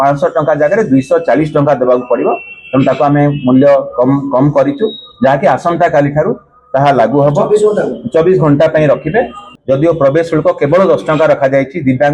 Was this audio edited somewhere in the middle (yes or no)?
yes